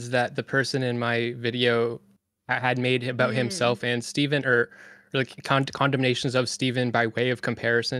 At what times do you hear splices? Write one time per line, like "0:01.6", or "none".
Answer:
none

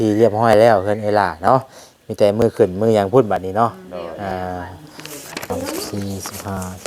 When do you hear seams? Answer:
0:05.5

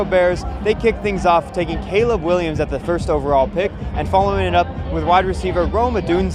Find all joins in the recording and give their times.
none

